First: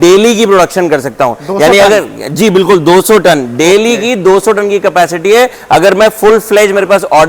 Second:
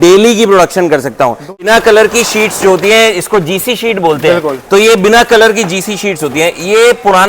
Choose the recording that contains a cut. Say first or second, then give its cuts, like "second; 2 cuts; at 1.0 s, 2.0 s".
second; 1 cut; at 1.6 s